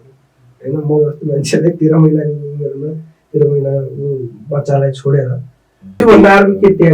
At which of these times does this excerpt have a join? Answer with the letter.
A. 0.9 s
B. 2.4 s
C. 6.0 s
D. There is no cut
C